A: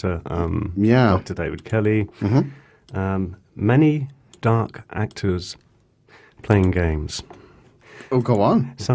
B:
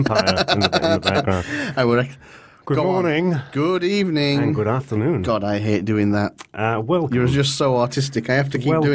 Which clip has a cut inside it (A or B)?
B